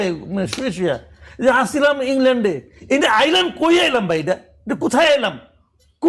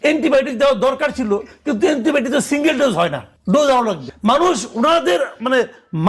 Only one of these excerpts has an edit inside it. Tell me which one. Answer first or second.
second